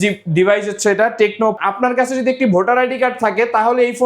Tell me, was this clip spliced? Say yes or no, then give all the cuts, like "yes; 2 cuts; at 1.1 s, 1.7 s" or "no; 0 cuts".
yes; 1 cut; at 1.6 s